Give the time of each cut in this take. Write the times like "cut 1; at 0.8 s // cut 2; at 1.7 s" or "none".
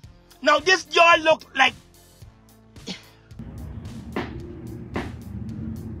cut 1; at 3.4 s